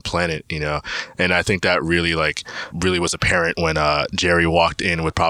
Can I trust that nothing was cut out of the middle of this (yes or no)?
no